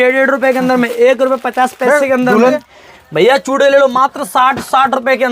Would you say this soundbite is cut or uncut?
cut